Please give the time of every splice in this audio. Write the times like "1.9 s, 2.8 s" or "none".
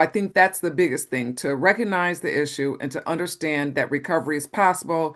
none